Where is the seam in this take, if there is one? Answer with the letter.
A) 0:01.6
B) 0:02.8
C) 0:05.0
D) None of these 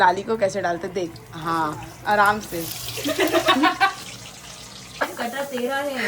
C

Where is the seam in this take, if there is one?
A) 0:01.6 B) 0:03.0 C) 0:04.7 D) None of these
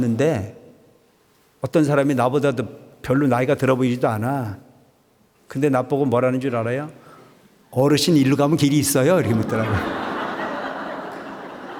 D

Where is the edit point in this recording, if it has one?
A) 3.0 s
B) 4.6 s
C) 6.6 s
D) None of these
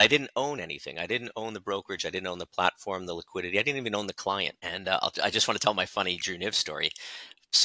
B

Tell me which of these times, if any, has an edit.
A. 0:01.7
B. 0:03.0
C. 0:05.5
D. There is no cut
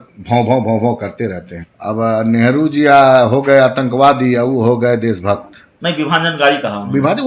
A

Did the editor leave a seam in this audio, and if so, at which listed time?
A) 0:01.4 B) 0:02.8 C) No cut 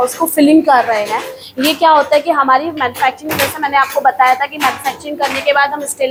C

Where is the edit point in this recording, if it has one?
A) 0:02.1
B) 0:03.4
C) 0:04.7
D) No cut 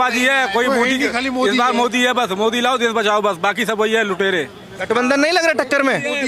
D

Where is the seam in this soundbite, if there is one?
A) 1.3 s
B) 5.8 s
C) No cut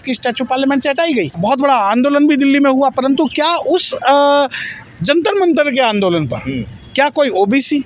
A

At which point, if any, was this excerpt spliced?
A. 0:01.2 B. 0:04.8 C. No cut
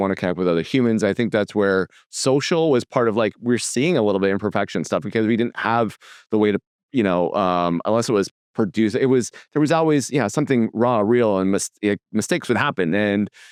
C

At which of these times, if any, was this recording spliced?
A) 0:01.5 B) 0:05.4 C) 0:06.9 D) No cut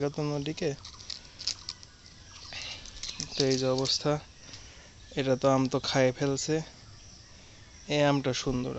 D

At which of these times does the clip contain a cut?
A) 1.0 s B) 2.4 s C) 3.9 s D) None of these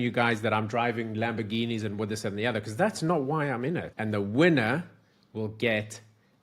C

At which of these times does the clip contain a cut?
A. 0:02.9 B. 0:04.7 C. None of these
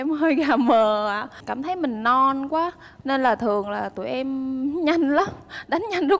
A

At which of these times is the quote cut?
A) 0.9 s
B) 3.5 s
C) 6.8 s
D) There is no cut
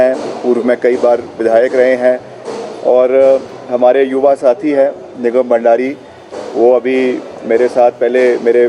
D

